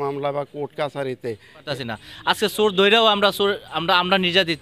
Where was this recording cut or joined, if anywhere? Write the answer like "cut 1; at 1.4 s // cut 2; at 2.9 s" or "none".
cut 1; at 1.7 s